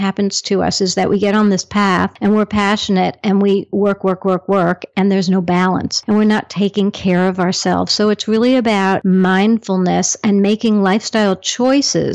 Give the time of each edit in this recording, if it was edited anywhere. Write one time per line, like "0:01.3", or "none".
0:02.1
0:05.9
0:09.0